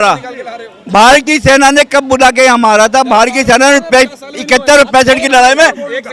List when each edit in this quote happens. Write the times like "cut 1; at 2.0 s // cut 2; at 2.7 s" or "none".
none

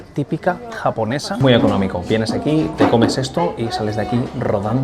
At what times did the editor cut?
cut 1; at 1.3 s

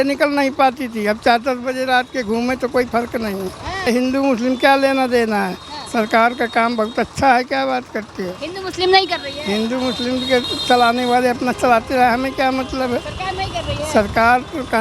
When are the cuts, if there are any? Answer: cut 1; at 3.9 s

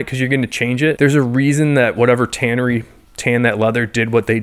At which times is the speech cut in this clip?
cut 1; at 1.0 s

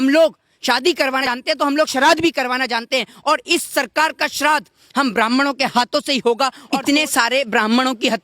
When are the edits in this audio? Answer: cut 1; at 1.3 s // cut 2; at 6.6 s

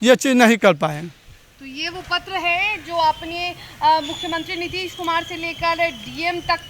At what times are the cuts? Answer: none

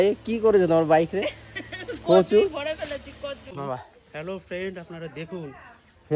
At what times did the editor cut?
cut 1; at 3.4 s

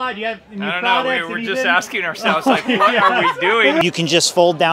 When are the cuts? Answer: cut 1; at 3.8 s

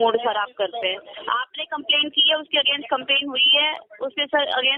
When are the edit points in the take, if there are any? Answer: none

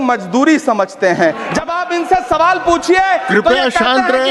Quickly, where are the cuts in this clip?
cut 1; at 1.6 s

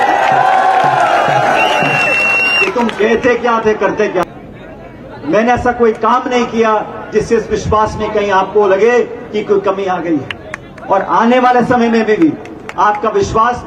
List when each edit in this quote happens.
cut 1; at 4.2 s

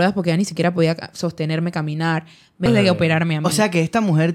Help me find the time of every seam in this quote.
cut 1; at 2.7 s

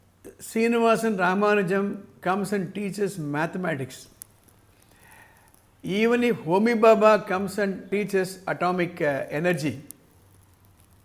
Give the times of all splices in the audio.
cut 1; at 7.9 s

